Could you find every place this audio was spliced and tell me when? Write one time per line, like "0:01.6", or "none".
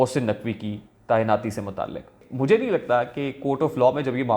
0:02.2